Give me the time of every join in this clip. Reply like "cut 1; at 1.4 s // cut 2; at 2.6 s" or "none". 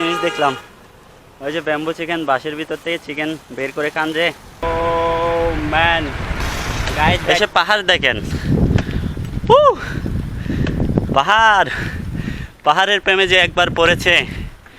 cut 1; at 4.6 s // cut 2; at 7.2 s